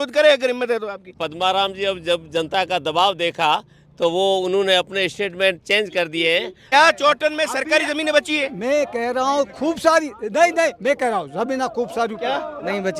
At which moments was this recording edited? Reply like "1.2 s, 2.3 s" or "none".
1.1 s, 6.7 s